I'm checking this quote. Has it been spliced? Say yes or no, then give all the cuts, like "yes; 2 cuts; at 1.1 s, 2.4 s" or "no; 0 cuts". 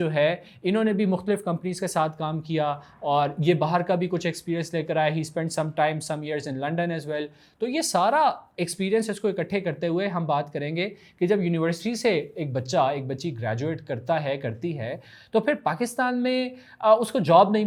no; 0 cuts